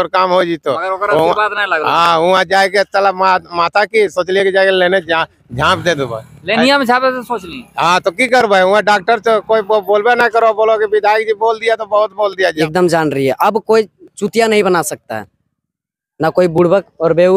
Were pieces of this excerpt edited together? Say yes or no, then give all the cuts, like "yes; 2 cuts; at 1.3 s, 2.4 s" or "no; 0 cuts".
yes; 1 cut; at 12.5 s